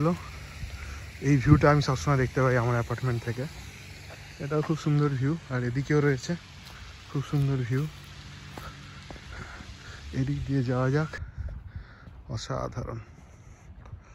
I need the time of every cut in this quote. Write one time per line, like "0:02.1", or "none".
0:11.3